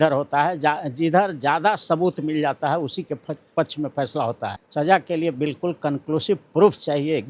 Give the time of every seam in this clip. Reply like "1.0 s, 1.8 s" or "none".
4.5 s